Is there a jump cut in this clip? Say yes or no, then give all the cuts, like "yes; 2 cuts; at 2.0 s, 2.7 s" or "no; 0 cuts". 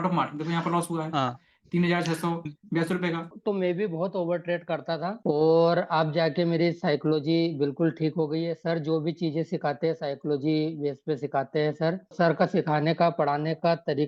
yes; 2 cuts; at 3.3 s, 12.1 s